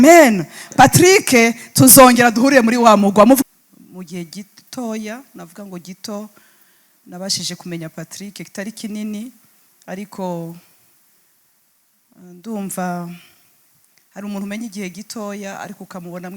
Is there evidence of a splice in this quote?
yes; 1 cut; at 3.4 s

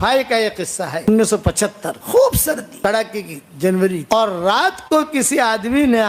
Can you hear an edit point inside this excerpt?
yes; 4 cuts; at 1.0 s, 1.9 s, 2.7 s, 4.0 s

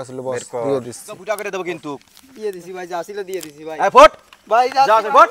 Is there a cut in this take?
yes; 1 cut; at 1.2 s

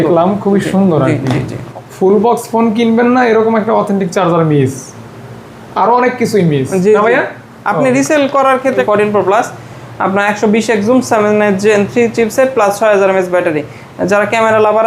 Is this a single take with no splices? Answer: no; 2 cuts; at 1.7 s, 8.8 s

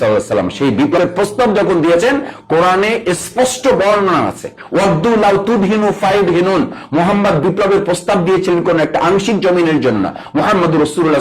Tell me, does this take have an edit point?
yes; 1 cut; at 1.0 s

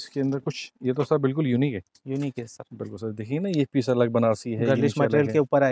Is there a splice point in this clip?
no; 0 cuts

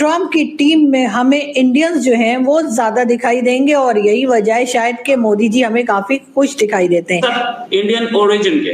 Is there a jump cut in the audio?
yes; 1 cut; at 7.2 s

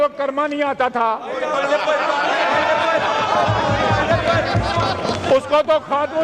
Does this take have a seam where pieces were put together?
no; 0 cuts

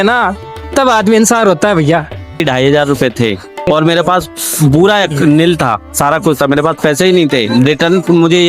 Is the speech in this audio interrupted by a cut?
yes; 2 cuts; at 2.4 s, 3.7 s

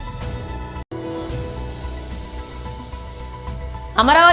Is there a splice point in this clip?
no; 0 cuts

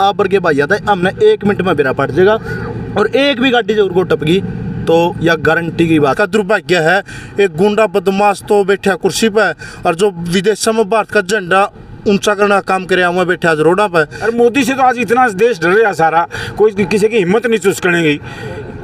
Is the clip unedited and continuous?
no; 2 cuts; at 6.1 s, 14.2 s

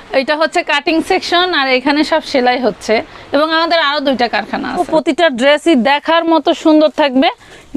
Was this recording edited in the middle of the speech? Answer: yes; 1 cut; at 4.8 s

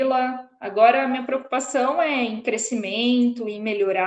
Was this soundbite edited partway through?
no; 0 cuts

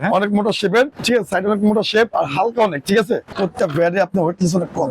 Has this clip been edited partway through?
yes; 1 cut; at 3.3 s

